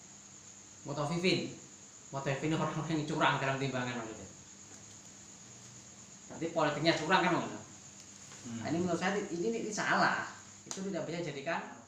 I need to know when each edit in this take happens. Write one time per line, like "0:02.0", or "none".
none

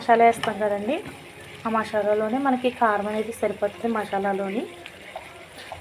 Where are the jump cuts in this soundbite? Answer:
none

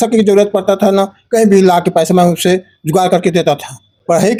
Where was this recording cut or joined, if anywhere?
none

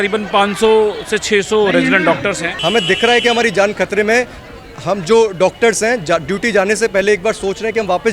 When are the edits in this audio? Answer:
0:02.5

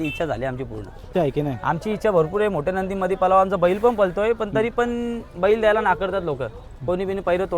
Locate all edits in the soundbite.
0:01.1

